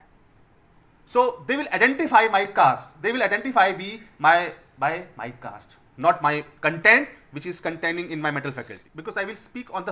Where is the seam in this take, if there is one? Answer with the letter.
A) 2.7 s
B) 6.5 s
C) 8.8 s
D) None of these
C